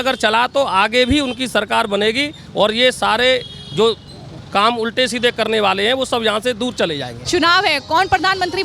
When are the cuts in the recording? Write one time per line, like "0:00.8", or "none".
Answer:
0:07.2

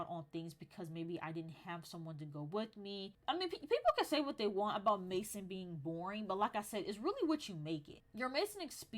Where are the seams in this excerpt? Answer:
0:03.2
0:08.0

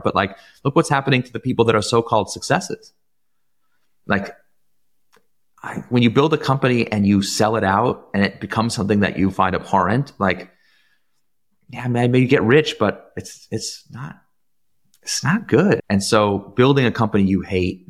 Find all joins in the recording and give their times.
0:15.8

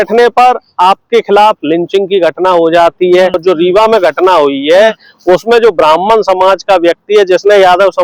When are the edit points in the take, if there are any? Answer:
0:03.4

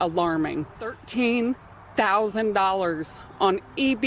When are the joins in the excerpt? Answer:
0:01.0

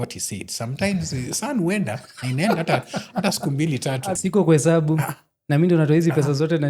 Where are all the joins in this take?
0:04.2

